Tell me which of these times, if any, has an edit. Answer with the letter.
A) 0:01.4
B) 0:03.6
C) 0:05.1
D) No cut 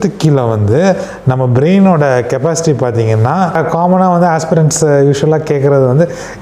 B